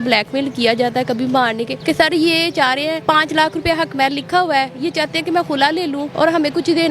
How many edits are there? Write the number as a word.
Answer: three